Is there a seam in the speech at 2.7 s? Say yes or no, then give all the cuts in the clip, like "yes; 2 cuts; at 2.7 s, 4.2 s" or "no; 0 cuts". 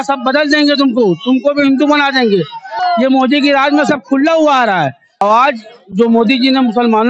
yes; 2 cuts; at 2.7 s, 5.1 s